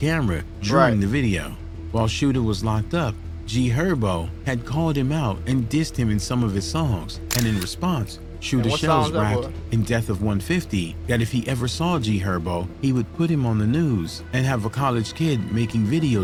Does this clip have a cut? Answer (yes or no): no